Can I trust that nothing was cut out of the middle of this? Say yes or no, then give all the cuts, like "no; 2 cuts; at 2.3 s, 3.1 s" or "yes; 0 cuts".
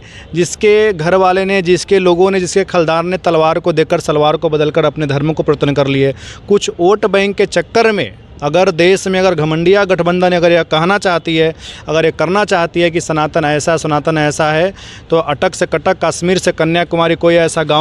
yes; 0 cuts